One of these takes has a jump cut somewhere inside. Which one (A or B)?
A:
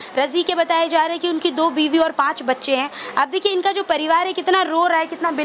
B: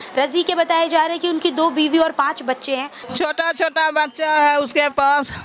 B